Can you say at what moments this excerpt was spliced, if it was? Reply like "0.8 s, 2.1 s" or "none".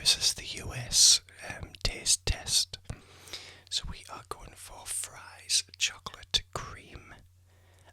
none